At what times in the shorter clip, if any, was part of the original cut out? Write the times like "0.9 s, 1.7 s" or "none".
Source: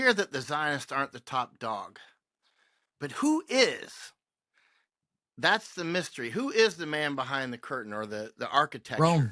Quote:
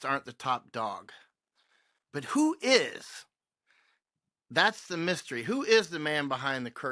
none